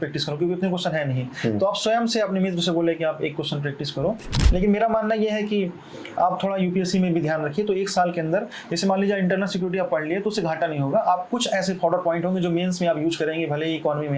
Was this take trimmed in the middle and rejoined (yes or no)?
yes